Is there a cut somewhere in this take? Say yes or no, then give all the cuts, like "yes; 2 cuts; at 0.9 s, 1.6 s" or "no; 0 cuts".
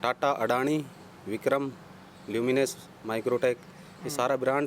no; 0 cuts